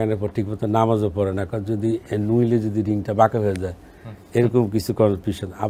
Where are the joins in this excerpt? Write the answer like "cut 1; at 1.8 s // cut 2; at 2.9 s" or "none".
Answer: none